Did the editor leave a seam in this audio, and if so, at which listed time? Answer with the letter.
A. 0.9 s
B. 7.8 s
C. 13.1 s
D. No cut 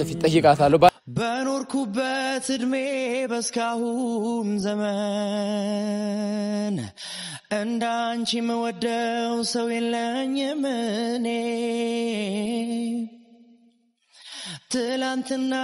A